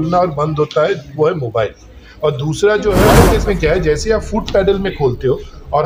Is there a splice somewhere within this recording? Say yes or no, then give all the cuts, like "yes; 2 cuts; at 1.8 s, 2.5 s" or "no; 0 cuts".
yes; 1 cut; at 3.1 s